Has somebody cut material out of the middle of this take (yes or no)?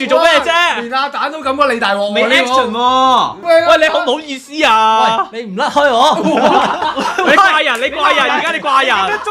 yes